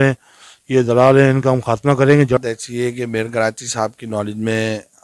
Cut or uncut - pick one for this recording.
cut